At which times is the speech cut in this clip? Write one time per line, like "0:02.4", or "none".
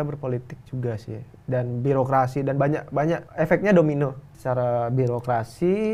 0:03.3
0:04.3